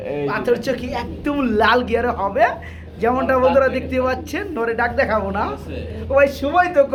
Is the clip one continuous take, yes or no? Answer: yes